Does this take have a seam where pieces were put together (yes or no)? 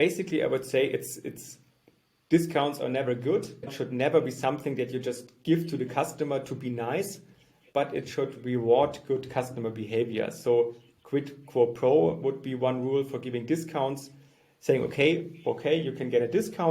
yes